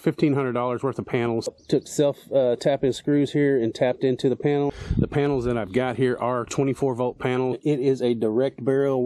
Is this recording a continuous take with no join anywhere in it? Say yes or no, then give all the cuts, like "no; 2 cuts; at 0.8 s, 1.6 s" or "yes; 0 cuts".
no; 3 cuts; at 1.5 s, 4.7 s, 7.6 s